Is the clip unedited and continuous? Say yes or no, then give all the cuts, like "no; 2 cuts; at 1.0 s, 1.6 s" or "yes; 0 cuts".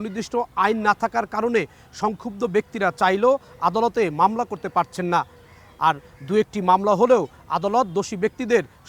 yes; 0 cuts